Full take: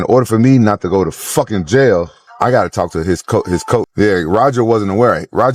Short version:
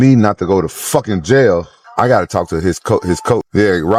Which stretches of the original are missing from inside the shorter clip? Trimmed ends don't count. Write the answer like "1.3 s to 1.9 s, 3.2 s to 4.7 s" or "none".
none